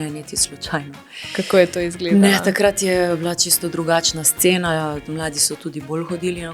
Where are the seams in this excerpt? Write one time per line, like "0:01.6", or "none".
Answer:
none

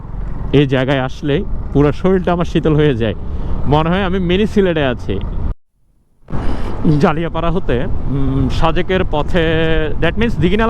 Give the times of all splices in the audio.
0:05.5

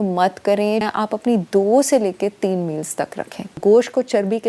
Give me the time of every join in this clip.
0:00.8
0:03.6

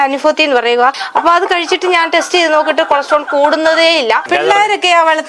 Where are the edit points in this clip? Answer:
0:01.0
0:04.2

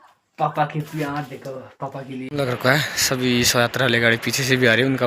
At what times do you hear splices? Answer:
0:02.3

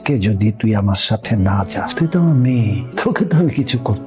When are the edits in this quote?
0:01.9
0:02.8

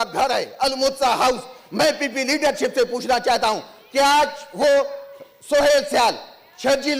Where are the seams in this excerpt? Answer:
none

